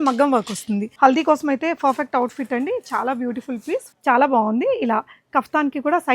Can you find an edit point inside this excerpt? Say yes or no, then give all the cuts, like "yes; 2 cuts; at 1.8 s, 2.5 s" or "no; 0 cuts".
yes; 2 cuts; at 0.9 s, 3.9 s